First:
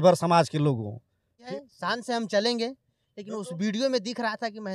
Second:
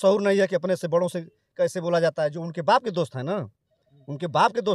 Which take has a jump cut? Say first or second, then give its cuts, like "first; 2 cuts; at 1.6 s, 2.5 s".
first; 1 cut; at 1.4 s